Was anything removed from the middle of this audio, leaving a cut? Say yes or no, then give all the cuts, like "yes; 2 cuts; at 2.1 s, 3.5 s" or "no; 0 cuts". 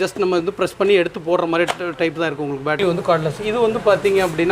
yes; 1 cut; at 2.8 s